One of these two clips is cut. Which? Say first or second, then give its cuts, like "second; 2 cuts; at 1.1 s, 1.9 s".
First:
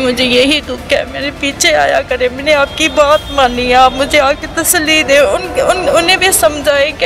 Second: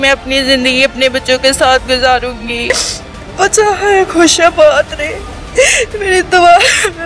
second; 1 cut; at 2.7 s